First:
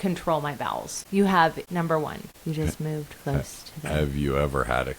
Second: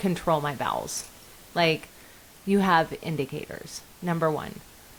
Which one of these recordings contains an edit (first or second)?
first